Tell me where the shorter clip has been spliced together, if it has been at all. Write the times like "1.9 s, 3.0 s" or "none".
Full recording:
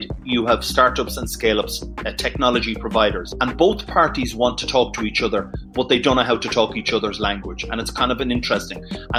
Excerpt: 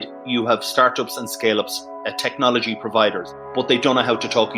3.3 s